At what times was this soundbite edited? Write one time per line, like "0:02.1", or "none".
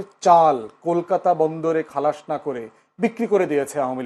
none